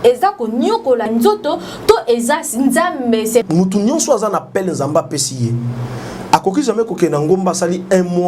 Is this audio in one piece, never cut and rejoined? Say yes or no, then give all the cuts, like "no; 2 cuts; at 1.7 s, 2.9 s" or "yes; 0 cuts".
no; 1 cut; at 3.4 s